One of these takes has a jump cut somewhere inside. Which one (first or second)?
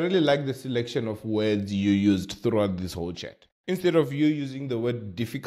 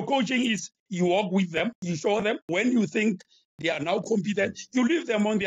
second